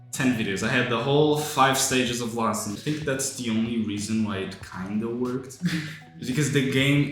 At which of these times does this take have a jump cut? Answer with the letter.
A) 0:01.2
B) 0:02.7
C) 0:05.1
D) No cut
B